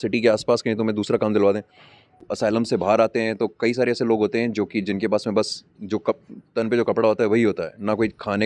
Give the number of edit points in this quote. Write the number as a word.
one